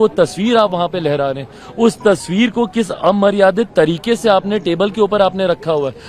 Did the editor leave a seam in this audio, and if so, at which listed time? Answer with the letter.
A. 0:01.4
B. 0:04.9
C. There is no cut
C